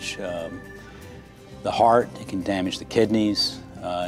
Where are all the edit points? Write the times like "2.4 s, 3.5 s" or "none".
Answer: none